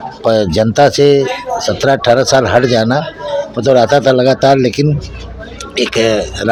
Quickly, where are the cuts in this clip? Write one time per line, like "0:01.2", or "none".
none